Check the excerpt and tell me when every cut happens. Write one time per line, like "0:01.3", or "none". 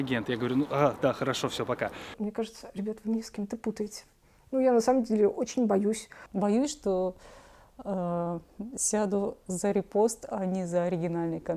0:02.1
0:06.1